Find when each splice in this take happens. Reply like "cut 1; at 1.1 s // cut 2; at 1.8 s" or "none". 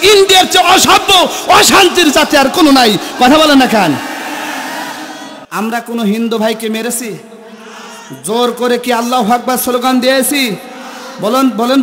none

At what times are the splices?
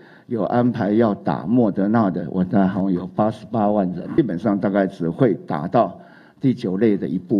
cut 1; at 4.2 s

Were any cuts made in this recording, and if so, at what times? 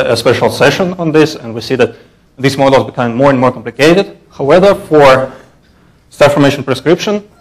cut 1; at 1.2 s

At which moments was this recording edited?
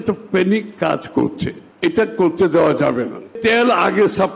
cut 1; at 1.6 s // cut 2; at 3.4 s

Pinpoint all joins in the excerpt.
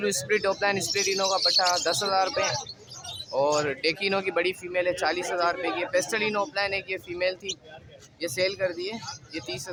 none

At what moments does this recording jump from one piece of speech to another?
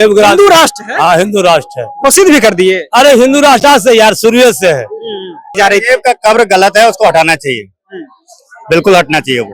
cut 1; at 5.6 s

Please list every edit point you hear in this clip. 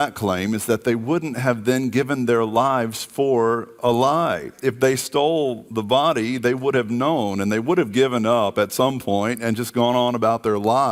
none

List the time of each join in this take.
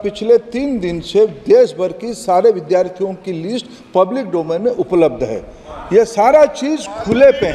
none

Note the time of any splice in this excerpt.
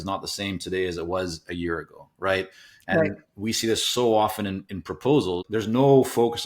cut 1; at 5.5 s

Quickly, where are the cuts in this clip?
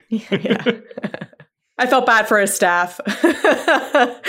cut 1; at 1.8 s

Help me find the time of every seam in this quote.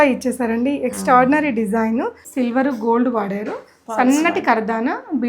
cut 1; at 2.2 s

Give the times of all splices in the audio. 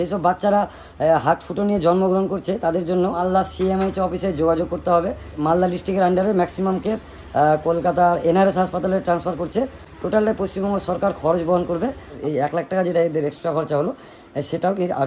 cut 1; at 3.2 s // cut 2; at 5.3 s // cut 3; at 12.2 s

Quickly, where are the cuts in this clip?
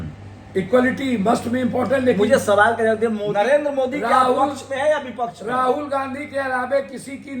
cut 1; at 3.2 s

